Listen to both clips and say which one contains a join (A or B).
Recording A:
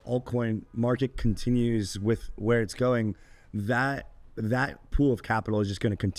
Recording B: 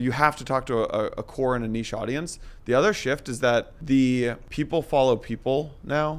B